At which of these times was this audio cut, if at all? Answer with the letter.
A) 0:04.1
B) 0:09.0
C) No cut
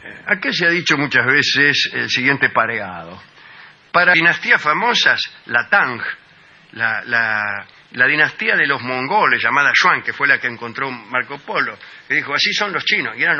C